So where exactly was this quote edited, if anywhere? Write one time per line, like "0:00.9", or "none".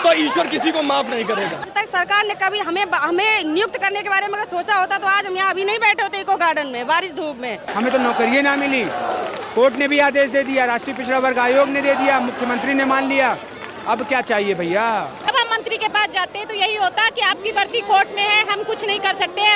0:01.7
0:07.7
0:15.3